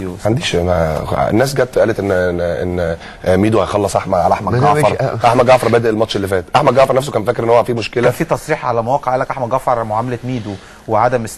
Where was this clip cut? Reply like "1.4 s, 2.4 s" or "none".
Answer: 3.1 s